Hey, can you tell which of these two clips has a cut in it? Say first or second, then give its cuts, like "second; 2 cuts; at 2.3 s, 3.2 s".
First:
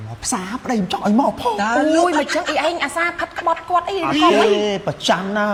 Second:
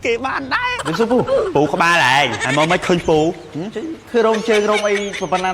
second; 2 cuts; at 0.8 s, 2.4 s